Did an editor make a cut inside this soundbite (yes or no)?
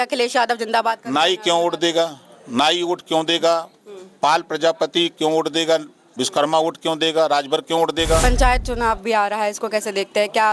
yes